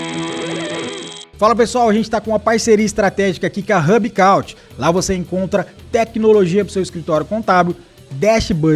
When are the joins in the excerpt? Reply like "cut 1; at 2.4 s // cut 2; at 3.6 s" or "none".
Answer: cut 1; at 1.2 s